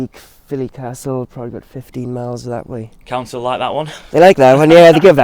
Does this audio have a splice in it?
no; 0 cuts

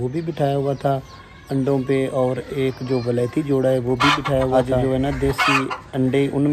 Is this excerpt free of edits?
no; 1 cut; at 4.5 s

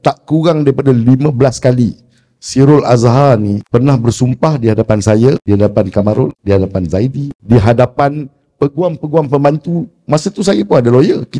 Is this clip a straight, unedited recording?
no; 4 cuts; at 3.6 s, 5.4 s, 6.4 s, 7.3 s

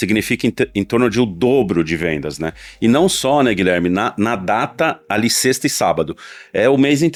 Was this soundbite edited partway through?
no; 0 cuts

